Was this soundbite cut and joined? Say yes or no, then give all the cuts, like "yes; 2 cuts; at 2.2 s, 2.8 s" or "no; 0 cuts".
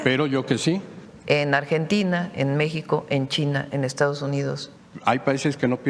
yes; 2 cuts; at 1.0 s, 4.7 s